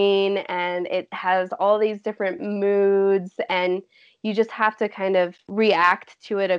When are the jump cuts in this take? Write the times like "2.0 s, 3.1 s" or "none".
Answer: 5.4 s